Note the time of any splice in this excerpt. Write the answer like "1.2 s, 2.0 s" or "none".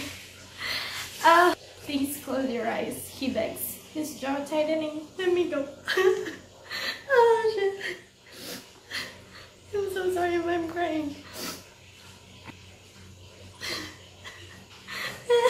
1.6 s, 12.3 s